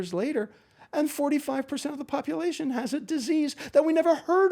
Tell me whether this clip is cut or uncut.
uncut